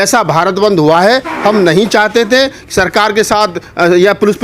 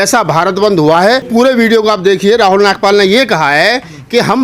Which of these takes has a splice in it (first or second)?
second